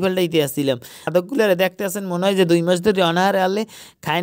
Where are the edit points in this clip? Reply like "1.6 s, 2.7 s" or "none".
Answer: 1.0 s